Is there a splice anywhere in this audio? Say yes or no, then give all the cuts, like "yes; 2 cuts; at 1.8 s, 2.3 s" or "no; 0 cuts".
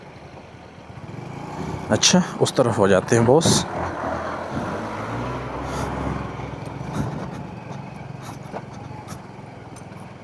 no; 0 cuts